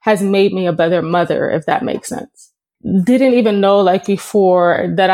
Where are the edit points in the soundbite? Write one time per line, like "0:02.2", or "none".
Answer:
0:02.7